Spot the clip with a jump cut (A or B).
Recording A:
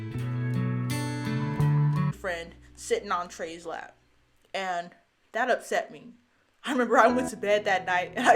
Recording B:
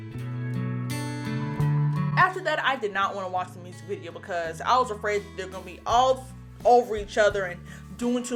A